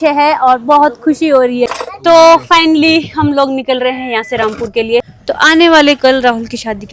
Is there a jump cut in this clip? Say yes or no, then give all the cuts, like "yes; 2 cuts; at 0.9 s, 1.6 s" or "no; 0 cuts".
yes; 2 cuts; at 1.7 s, 5.1 s